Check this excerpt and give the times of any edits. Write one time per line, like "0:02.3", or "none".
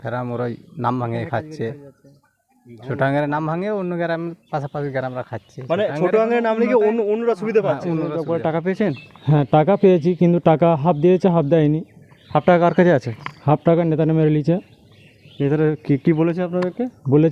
0:08.2